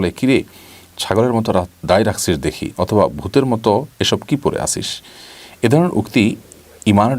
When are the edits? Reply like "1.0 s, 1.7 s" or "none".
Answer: none